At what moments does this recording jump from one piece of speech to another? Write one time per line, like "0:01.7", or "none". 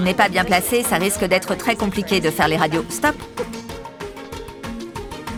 none